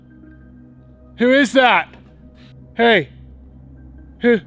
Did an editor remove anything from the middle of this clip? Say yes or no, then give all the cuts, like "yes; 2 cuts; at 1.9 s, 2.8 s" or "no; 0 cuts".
no; 0 cuts